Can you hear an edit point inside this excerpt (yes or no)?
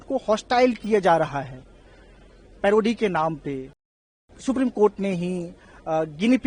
yes